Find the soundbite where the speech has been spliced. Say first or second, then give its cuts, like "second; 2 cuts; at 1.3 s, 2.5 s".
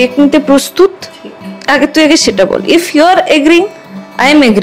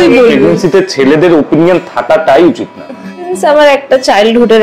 second; 1 cut; at 3.3 s